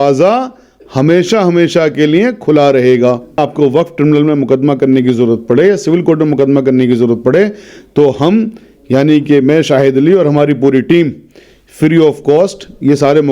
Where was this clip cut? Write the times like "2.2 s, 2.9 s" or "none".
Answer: 3.4 s